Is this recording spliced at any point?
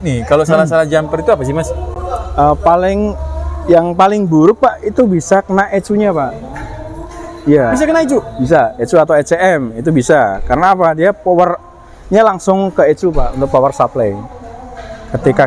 no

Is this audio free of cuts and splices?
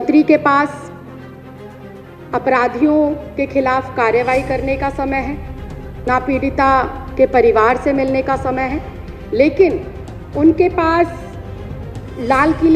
yes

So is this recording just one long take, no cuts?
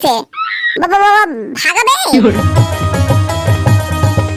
no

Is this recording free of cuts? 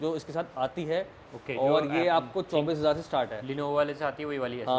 yes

